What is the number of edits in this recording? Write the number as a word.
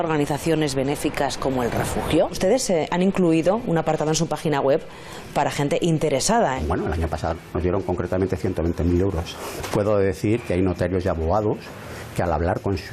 three